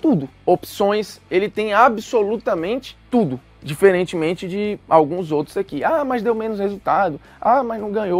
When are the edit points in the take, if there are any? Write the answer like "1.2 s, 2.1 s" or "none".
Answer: none